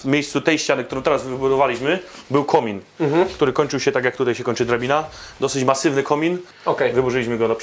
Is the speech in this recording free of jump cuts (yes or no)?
no